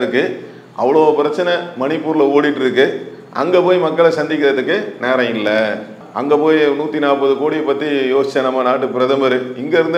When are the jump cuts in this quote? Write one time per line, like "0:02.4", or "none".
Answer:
none

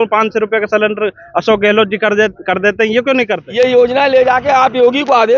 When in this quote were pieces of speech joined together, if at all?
0:03.4

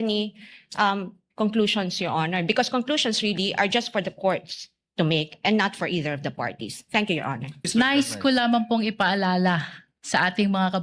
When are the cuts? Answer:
0:07.7

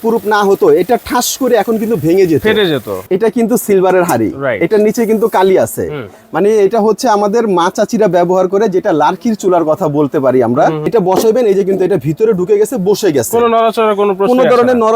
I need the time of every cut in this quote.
0:02.9
0:10.8

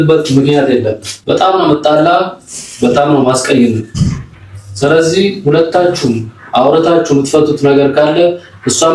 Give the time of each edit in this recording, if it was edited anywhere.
0:01.1

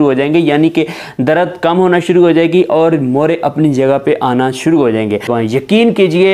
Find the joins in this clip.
0:05.3

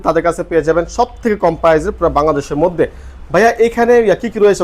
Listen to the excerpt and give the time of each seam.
none

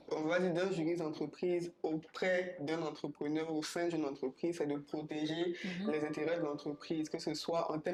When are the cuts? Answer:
none

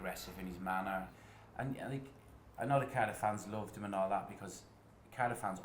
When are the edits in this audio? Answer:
0:01.1

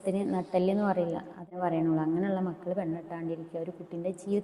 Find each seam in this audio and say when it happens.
0:01.5

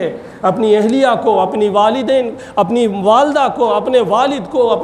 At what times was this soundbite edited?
none

